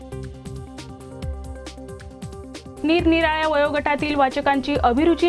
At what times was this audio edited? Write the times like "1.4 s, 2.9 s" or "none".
2.8 s